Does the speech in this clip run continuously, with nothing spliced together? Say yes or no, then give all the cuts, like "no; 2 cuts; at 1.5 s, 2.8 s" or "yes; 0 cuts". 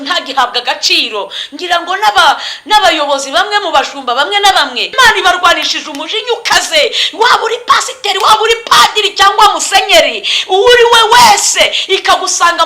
no; 1 cut; at 4.9 s